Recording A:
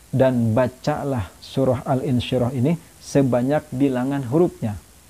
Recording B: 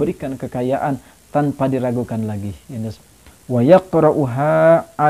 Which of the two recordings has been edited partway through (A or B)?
B